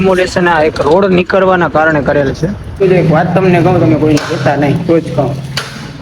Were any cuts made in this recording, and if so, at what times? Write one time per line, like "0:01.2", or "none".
0:02.8